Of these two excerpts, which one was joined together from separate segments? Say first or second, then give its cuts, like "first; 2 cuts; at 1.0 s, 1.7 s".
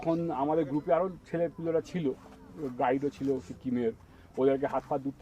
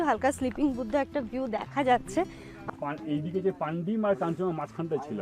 second; 1 cut; at 2.5 s